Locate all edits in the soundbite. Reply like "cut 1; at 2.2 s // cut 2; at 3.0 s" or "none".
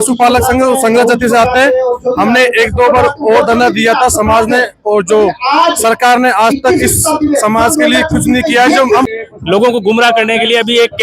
cut 1; at 9.1 s